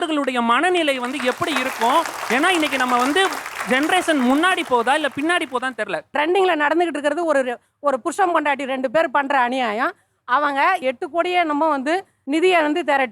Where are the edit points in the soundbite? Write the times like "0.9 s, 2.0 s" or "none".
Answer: 6.1 s